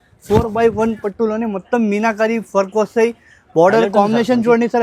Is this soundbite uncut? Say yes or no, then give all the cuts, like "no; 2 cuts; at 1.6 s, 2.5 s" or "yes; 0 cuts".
yes; 0 cuts